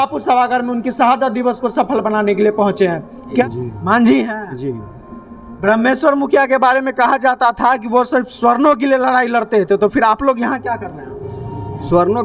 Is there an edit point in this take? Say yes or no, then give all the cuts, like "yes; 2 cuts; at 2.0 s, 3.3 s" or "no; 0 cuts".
yes; 1 cut; at 3.4 s